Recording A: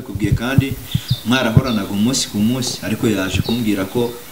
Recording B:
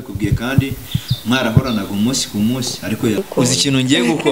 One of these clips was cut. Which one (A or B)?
B